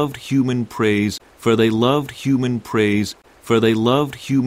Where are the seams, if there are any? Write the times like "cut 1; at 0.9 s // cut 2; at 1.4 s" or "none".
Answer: none

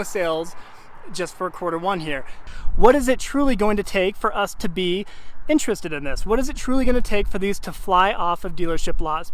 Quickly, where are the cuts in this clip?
cut 1; at 2.4 s

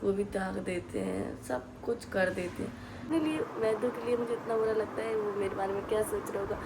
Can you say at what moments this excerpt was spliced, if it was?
cut 1; at 3.0 s

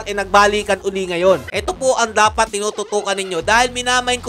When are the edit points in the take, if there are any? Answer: cut 1; at 1.5 s

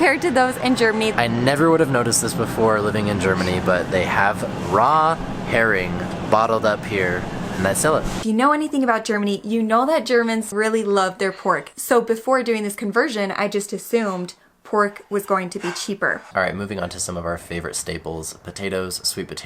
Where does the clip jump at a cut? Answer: cut 1; at 1.1 s // cut 2; at 8.2 s // cut 3; at 10.5 s // cut 4; at 11.7 s // cut 5; at 16.2 s

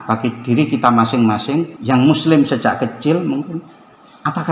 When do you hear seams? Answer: cut 1; at 1.8 s

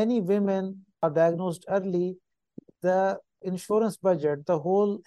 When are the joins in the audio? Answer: cut 1; at 1.0 s // cut 2; at 3.4 s

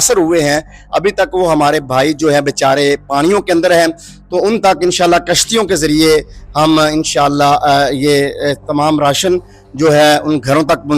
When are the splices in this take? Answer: none

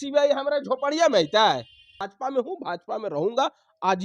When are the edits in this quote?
cut 1; at 2.0 s

